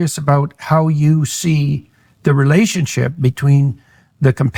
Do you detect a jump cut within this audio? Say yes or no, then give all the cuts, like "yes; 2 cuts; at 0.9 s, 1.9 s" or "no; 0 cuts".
no; 0 cuts